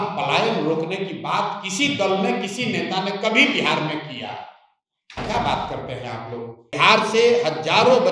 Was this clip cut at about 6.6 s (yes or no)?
yes